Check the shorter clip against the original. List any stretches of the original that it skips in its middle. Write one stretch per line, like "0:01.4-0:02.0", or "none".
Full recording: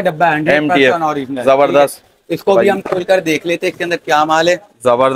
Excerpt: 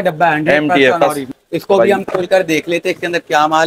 0:01.2-0:02.0